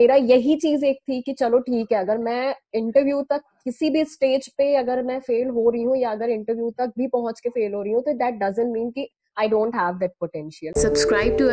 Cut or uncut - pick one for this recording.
cut